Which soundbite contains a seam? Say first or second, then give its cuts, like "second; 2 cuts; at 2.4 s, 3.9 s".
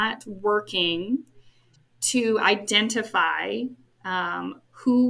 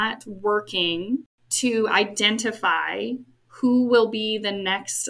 second; 2 cuts; at 1.4 s, 3.4 s